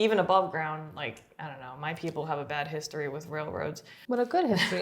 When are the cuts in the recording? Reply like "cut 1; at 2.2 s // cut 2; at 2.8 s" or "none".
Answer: cut 1; at 3.9 s